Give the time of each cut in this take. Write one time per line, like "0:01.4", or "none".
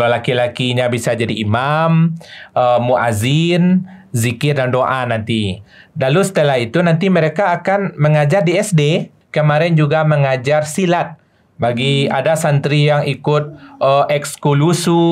0:09.2